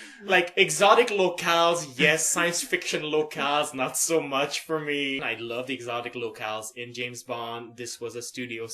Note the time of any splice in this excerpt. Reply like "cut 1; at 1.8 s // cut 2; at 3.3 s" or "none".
cut 1; at 4.9 s